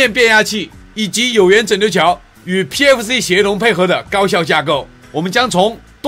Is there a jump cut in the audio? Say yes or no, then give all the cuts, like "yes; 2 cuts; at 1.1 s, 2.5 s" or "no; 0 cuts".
yes; 1 cut; at 5.0 s